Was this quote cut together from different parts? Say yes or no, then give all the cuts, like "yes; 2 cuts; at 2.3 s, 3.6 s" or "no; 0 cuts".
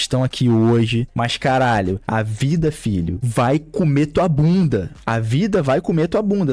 no; 0 cuts